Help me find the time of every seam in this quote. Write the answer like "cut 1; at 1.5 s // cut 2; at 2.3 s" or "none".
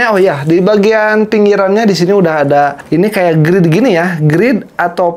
cut 1; at 2.8 s